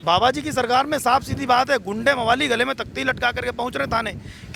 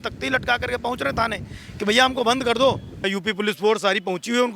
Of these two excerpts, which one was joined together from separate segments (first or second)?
second